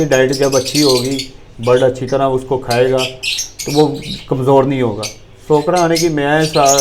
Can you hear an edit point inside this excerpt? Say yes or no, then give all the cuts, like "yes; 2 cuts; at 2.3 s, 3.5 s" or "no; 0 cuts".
no; 0 cuts